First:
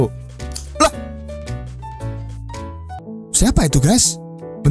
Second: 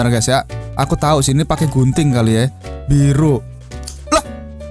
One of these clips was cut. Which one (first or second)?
first